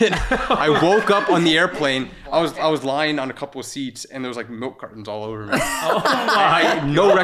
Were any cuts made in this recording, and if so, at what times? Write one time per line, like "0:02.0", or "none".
none